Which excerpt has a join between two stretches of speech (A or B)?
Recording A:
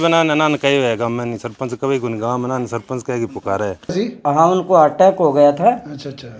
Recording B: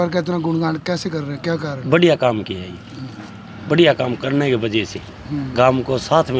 A